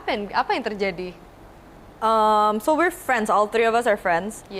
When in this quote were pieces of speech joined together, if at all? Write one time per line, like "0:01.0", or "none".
none